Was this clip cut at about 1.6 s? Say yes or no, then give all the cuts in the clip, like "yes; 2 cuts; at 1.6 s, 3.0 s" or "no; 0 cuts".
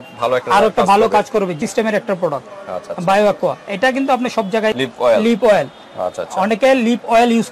yes; 2 cuts; at 1.6 s, 4.8 s